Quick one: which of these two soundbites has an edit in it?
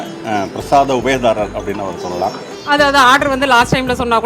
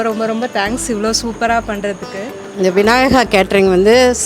second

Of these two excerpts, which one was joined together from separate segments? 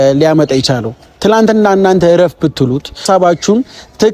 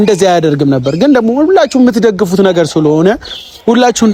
first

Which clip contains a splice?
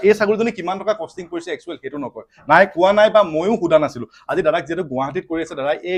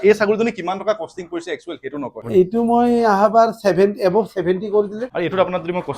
second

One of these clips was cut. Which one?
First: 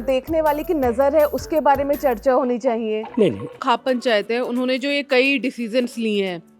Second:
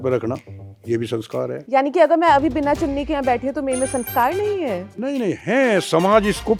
first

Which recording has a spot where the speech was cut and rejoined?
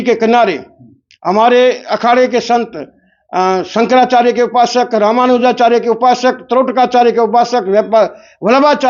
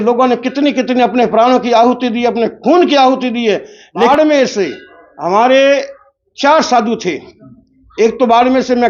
second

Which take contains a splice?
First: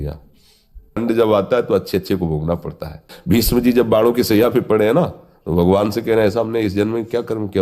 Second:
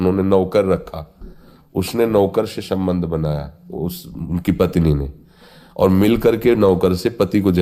first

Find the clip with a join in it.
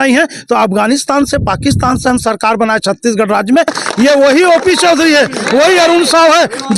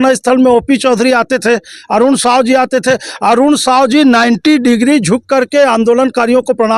first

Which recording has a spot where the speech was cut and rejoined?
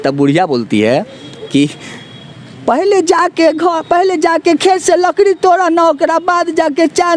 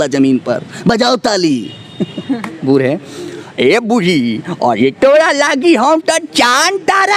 second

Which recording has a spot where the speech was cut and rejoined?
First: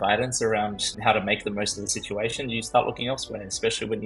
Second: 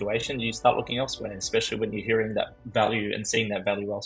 first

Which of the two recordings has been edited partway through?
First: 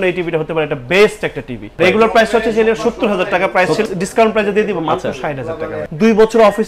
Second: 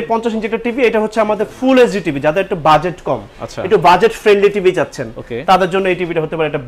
first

